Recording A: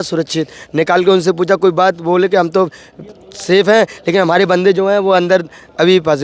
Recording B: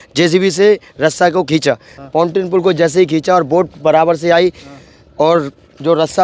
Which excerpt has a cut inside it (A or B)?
B